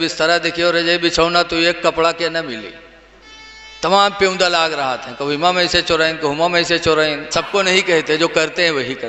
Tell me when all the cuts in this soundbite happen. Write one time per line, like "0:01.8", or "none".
0:07.2